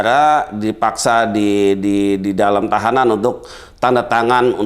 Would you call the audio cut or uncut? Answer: uncut